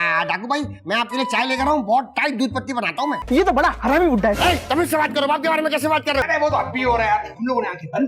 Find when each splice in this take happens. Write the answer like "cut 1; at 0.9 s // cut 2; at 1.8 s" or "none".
cut 1; at 3.2 s // cut 2; at 6.3 s